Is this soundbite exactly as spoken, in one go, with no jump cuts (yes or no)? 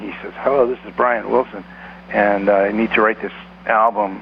yes